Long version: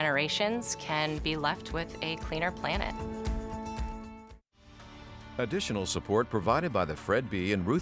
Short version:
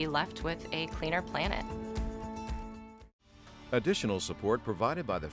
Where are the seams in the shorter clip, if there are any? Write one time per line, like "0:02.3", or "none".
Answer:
0:03.5